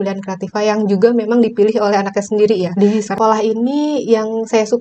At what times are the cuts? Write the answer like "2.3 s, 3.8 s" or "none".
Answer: 2.7 s